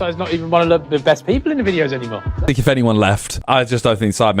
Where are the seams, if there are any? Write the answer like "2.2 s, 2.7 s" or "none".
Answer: 2.4 s, 3.3 s